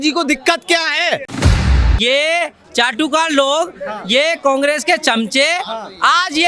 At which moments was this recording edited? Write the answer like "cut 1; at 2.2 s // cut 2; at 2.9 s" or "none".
cut 1; at 1.5 s